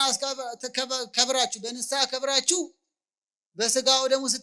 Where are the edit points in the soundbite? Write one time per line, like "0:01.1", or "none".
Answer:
none